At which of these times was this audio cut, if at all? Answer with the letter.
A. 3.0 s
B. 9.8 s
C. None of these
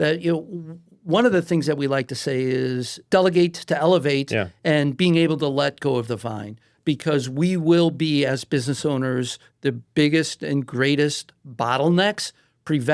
A